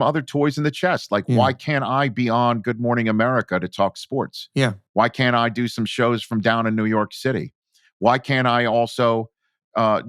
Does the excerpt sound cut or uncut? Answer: uncut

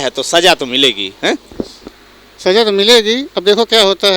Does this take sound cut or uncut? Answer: uncut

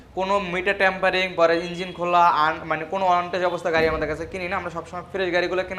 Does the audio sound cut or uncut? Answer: uncut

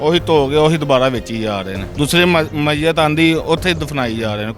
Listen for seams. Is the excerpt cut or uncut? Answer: cut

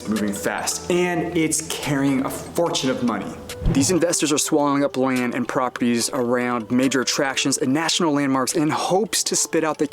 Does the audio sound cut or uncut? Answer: cut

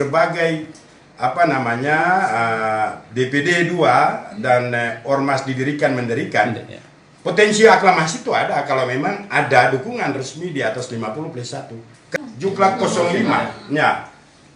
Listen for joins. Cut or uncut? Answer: cut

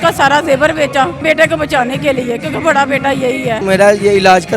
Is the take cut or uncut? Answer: cut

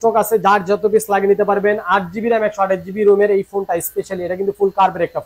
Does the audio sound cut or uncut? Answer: uncut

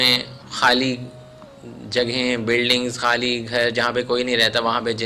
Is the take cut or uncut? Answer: uncut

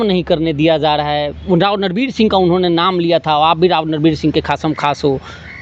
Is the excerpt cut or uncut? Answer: uncut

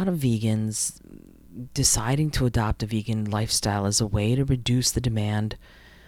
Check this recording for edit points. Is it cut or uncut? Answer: uncut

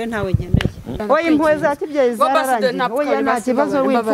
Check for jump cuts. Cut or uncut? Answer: cut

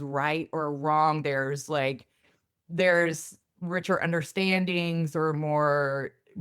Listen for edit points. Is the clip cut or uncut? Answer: uncut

